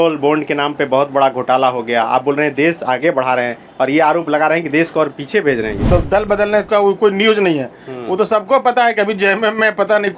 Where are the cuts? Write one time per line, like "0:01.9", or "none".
0:05.9